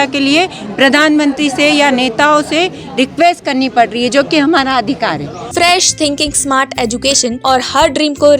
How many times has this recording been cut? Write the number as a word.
two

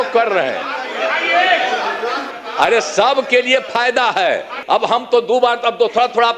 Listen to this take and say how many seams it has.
two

